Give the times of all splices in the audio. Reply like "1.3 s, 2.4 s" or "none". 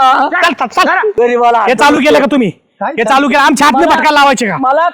1.1 s